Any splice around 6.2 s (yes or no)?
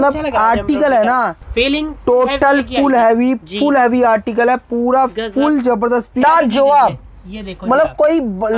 yes